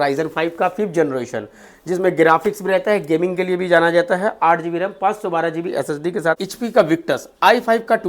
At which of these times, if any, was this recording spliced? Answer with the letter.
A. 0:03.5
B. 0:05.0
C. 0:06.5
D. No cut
C